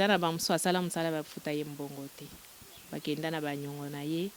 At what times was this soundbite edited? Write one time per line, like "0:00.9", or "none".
none